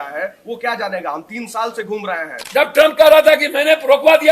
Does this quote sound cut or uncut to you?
cut